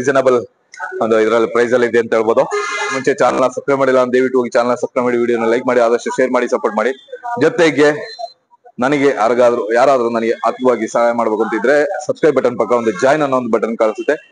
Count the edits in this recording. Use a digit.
1